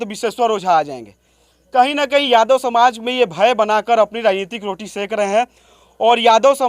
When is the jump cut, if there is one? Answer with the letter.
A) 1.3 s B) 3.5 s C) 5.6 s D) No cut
D